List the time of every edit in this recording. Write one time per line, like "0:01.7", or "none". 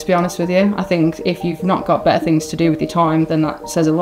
none